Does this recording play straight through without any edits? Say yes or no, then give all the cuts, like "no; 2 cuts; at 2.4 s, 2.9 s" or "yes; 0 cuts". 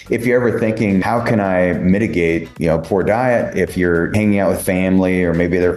no; 3 cuts; at 1.0 s, 2.5 s, 4.1 s